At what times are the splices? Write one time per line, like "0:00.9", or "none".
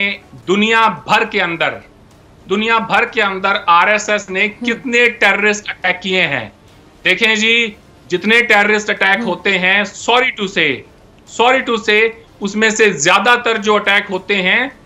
none